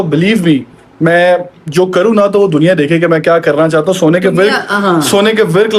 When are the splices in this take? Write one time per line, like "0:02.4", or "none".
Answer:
none